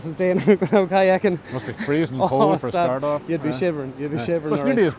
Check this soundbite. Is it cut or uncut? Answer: uncut